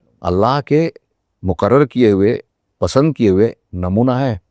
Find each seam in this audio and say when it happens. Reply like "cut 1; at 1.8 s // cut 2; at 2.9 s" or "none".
none